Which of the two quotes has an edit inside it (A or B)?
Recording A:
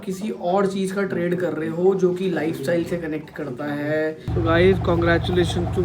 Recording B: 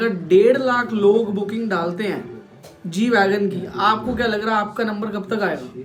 A